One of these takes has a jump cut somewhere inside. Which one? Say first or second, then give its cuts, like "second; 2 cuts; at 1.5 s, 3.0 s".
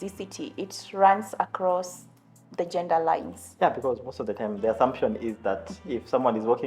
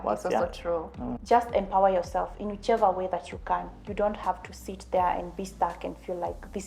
second; 1 cut; at 1.1 s